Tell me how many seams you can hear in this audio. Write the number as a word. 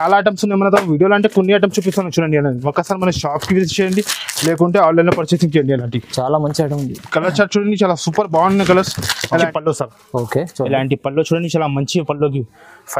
one